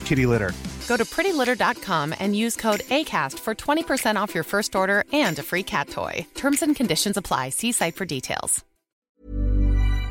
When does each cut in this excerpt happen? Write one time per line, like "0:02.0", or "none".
0:08.9

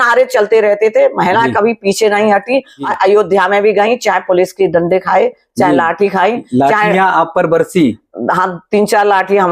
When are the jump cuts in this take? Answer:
0:02.9

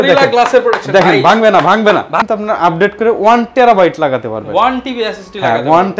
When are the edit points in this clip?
0:02.2

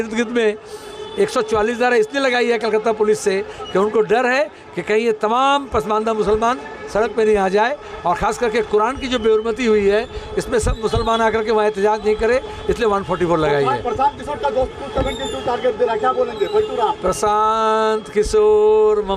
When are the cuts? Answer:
none

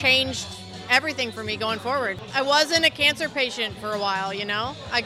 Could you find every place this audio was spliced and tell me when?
0:02.2

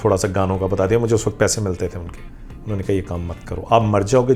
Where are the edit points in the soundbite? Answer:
none

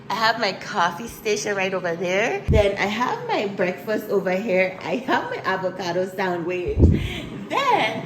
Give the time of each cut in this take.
0:02.5

